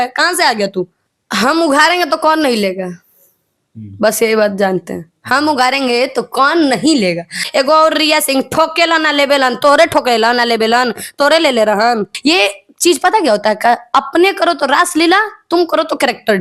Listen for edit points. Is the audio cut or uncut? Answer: cut